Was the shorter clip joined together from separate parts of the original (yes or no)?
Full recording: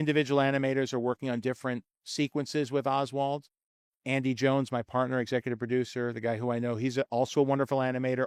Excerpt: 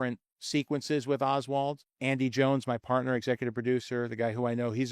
yes